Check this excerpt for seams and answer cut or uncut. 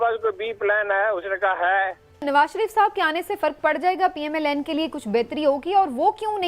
cut